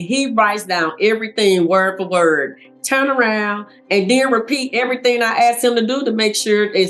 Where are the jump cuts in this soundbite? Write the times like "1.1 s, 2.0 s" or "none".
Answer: none